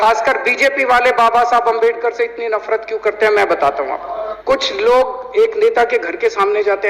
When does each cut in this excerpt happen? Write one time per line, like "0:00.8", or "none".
0:04.1